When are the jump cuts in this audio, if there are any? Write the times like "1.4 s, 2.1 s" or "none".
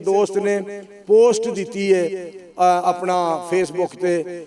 none

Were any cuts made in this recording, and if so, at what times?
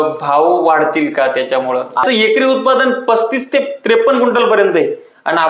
1.9 s

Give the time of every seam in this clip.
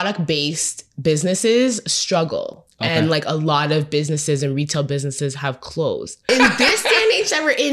6.3 s

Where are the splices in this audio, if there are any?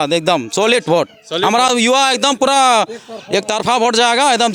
none

